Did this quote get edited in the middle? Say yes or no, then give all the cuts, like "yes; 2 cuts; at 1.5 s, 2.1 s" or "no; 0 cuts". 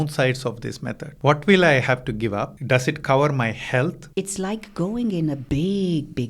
yes; 4 cuts; at 1.0 s, 2.6 s, 4.0 s, 5.4 s